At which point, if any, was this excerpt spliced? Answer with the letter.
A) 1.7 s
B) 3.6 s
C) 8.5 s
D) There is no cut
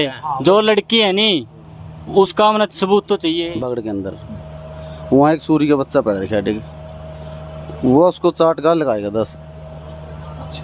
B